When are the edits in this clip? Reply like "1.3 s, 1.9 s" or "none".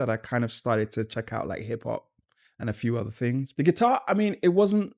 3.5 s

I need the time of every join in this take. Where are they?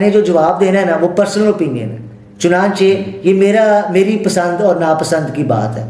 none

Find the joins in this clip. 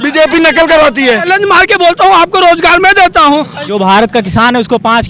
1.2 s, 3.6 s

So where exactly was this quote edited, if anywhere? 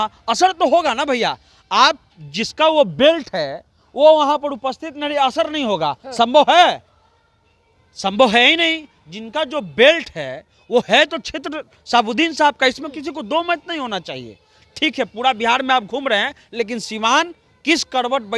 none

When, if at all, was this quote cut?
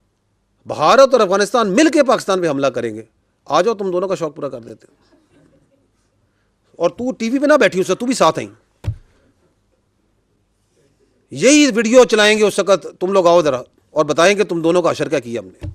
none

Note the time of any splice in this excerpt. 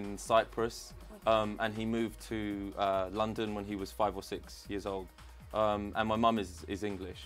none

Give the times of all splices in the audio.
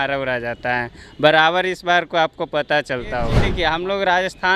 3.4 s

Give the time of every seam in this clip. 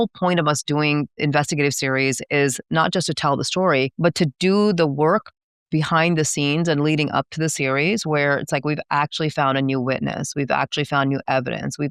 1.2 s

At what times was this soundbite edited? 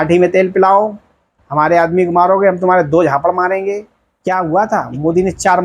4.1 s

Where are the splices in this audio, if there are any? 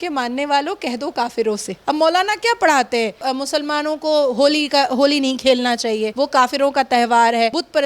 1.8 s

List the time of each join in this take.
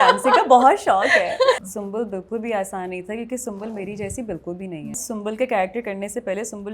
1.6 s, 5.0 s

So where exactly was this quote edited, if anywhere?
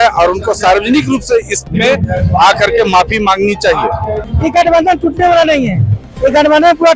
4.2 s

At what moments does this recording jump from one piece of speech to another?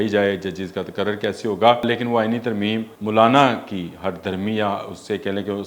1.9 s, 2.9 s

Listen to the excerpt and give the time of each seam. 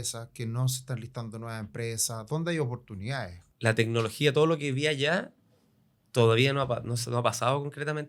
3.4 s

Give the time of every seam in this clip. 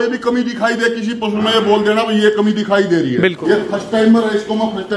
3.4 s

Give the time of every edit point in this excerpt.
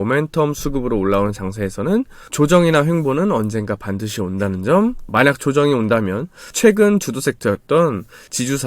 5.0 s

